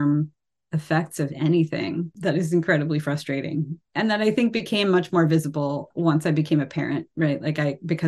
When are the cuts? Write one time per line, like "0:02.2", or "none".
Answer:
0:02.1
0:03.8
0:05.8

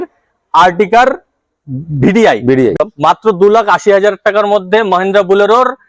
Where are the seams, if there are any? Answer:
0:02.8

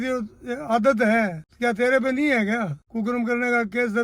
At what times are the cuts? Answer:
0:01.4
0:02.8

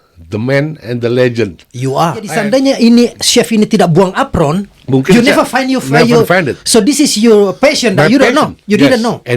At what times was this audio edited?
0:02.3

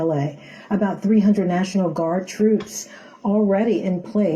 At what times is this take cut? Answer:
0:01.2

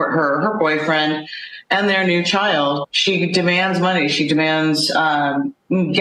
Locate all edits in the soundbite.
0:02.4

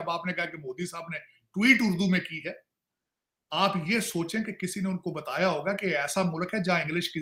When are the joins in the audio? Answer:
none

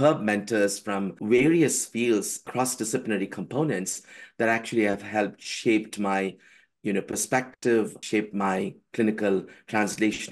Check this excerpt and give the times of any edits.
0:01.1
0:02.4
0:08.0

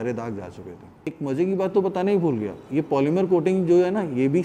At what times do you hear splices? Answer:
0:01.1

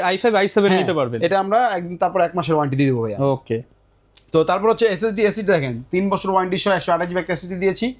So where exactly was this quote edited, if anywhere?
none

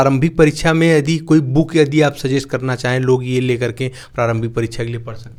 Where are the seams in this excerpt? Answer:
none

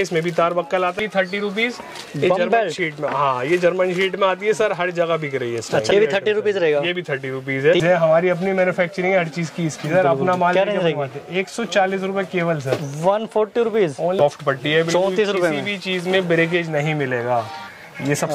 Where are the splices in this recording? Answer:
0:01.0
0:05.9
0:07.8
0:14.2

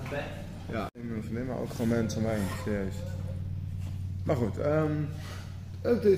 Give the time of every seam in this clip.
0:00.9

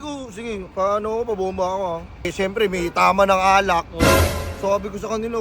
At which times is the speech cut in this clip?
0:02.3

